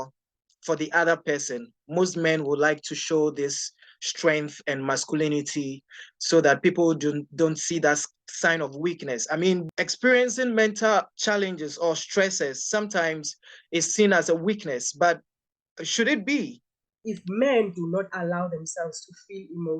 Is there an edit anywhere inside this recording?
yes; 3 cuts; at 9.6 s, 11.1 s, 17.0 s

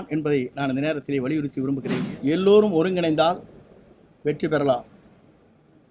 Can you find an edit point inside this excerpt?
yes; 1 cut; at 2.0 s

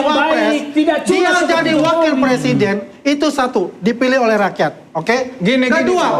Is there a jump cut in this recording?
no; 0 cuts

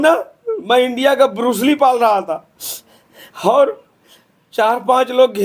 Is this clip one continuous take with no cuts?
yes; 0 cuts

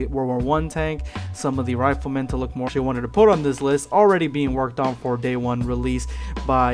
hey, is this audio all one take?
yes; 0 cuts

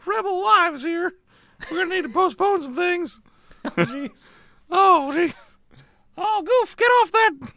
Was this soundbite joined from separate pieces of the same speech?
no; 0 cuts

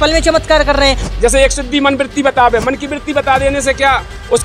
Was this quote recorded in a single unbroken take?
no; 1 cut; at 1.1 s

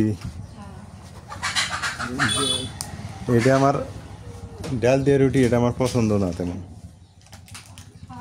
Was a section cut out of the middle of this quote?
no; 0 cuts

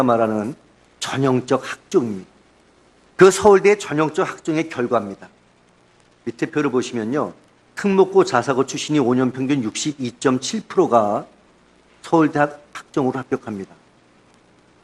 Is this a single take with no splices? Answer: yes; 0 cuts

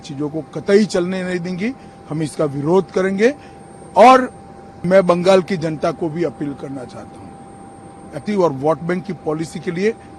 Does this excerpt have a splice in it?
no; 0 cuts

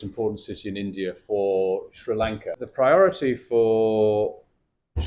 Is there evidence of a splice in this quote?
yes; 1 cut; at 2.6 s

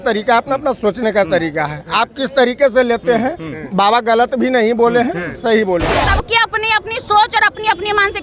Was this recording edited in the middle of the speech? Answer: yes; 1 cut; at 6.0 s

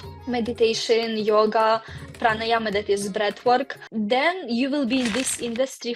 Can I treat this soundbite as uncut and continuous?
yes; 0 cuts

